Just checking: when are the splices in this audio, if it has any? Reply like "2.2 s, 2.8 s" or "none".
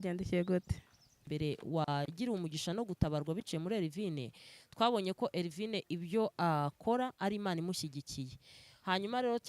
1.3 s